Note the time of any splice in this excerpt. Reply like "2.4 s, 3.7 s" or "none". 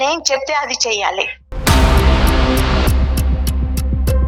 1.4 s